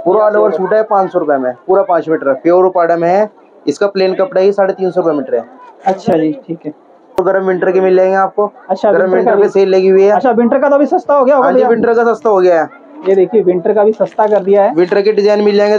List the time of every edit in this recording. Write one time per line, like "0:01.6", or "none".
none

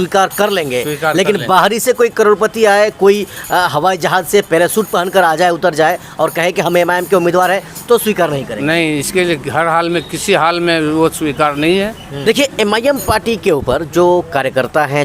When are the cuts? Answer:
0:12.1

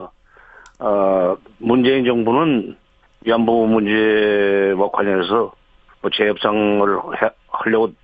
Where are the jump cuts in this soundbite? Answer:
0:06.4

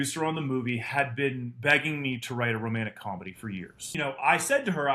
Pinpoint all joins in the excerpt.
0:03.8

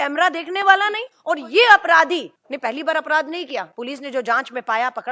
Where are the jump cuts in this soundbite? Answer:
0:01.1
0:02.4
0:03.7

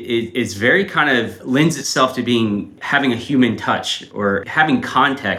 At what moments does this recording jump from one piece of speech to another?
0:01.4
0:02.8
0:04.5

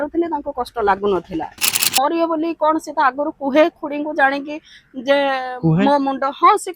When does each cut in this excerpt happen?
0:01.9

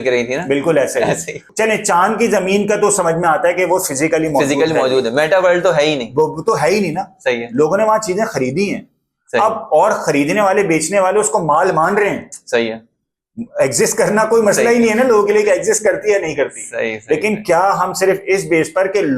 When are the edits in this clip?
0:01.4

